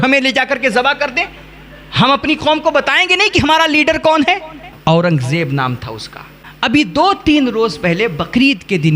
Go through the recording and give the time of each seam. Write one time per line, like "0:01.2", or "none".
0:04.6